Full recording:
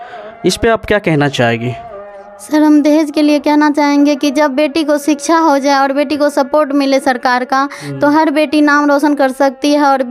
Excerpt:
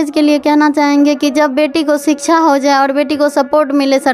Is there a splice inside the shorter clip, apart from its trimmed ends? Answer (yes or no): no